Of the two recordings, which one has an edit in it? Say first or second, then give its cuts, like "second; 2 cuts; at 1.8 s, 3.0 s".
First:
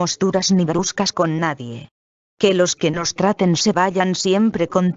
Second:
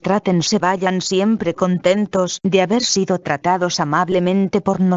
second; 1 cut; at 3.6 s